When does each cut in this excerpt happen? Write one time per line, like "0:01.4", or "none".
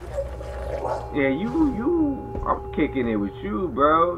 0:01.1